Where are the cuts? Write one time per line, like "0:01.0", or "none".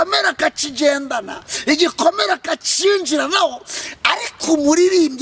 none